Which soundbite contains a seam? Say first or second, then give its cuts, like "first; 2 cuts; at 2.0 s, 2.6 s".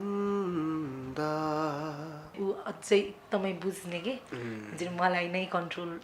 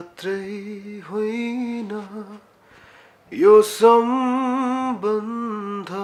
first; 1 cut; at 2.3 s